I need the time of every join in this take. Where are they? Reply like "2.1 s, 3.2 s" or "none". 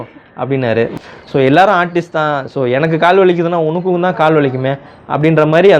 1.0 s